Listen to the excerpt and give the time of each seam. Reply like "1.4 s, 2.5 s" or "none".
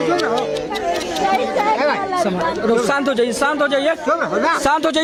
none

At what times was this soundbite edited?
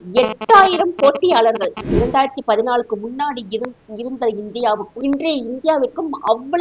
1.8 s, 4.9 s

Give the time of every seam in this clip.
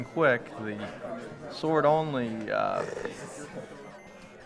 2.5 s

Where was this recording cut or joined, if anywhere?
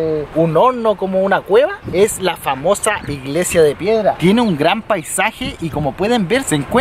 none

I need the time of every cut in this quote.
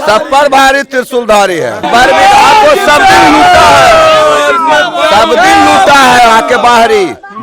1.9 s

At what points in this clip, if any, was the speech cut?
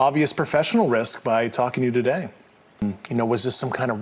2.8 s

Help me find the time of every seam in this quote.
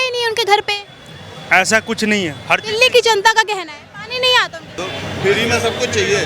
4.8 s

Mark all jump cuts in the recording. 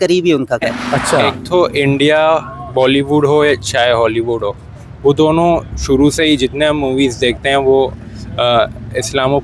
1.3 s

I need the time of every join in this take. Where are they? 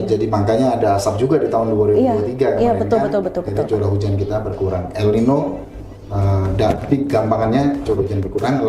none

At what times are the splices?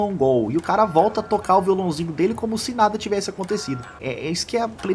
3.9 s

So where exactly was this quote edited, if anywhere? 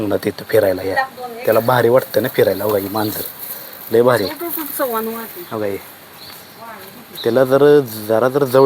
none

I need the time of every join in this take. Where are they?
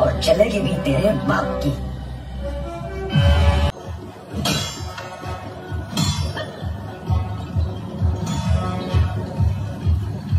3.7 s

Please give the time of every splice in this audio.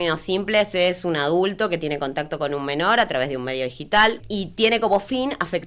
4.2 s

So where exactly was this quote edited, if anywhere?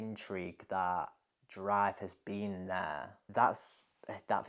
3.2 s

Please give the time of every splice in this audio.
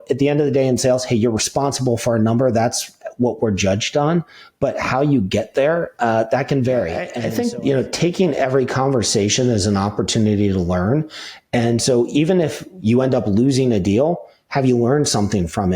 7.1 s

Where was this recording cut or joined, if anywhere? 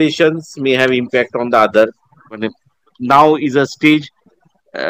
2.5 s

